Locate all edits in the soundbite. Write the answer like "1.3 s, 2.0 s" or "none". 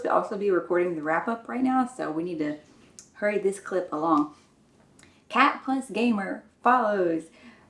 none